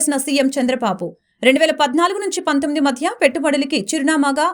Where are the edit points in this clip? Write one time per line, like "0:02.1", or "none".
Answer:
none